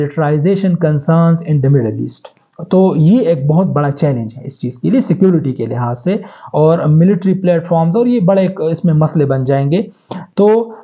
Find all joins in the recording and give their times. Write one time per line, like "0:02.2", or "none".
none